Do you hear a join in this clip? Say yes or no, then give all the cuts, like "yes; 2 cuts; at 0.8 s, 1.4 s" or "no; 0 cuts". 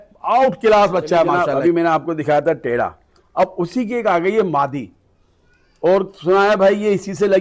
yes; 1 cut; at 1.4 s